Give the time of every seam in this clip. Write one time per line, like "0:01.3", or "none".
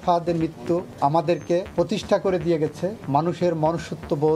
0:00.9
0:01.7
0:03.0